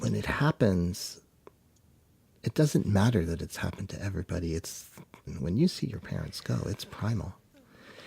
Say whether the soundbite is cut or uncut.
cut